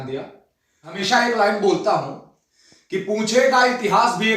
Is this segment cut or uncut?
cut